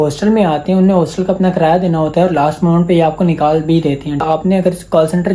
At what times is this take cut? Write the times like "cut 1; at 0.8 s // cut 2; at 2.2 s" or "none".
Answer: cut 1; at 4.2 s

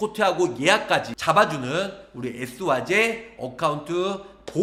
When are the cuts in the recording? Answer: none

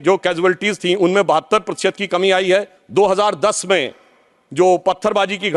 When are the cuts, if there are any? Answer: cut 1; at 2.8 s

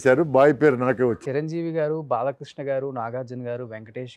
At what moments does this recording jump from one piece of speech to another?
cut 1; at 1.1 s

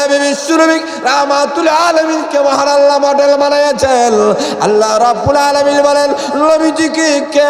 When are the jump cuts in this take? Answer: none

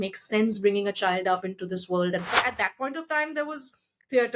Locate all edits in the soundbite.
cut 1; at 2.3 s

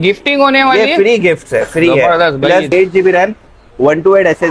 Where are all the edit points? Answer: cut 1; at 2.7 s

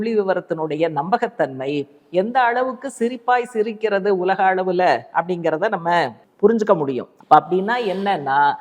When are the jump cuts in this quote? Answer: cut 1; at 6.2 s // cut 2; at 7.1 s

